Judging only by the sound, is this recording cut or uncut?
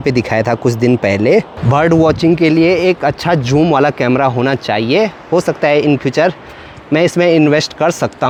uncut